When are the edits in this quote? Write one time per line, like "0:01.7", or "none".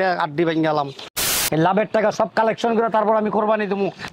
0:01.4